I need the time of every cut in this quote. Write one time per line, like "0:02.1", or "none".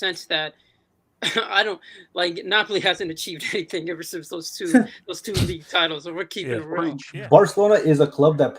0:07.0